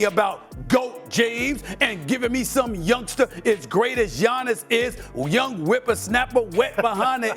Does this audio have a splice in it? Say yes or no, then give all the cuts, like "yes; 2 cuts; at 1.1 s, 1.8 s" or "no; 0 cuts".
no; 0 cuts